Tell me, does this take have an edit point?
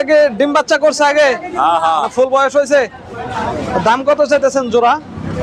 no; 0 cuts

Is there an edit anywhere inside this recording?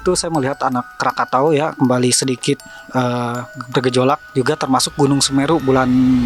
no; 0 cuts

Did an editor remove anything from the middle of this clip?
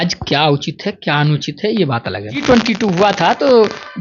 yes; 1 cut; at 2.4 s

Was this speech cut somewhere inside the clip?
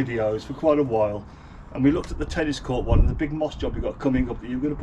no; 0 cuts

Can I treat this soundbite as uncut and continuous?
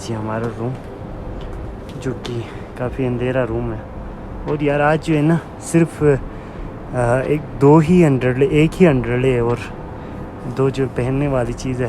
yes; 0 cuts

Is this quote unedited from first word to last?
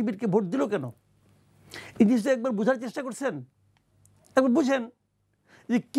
yes; 0 cuts

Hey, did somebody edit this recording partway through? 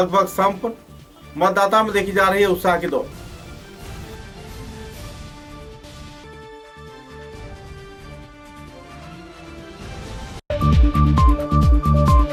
no; 0 cuts

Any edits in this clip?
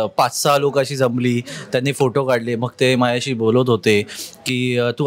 no; 0 cuts

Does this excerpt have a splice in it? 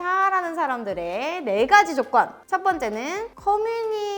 no; 0 cuts

